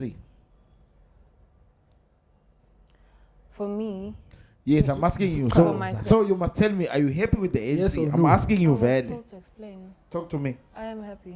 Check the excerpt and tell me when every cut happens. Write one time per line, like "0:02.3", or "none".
none